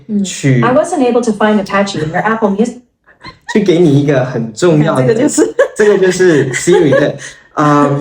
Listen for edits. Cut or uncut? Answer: uncut